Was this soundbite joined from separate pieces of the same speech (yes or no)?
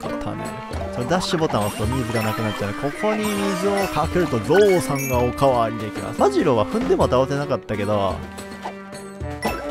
yes